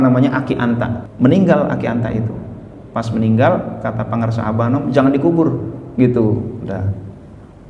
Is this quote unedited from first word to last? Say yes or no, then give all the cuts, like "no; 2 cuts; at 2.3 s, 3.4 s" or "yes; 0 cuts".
no; 1 cut; at 1.0 s